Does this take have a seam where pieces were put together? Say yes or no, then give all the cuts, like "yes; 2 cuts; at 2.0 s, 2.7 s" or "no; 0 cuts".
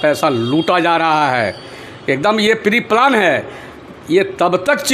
no; 0 cuts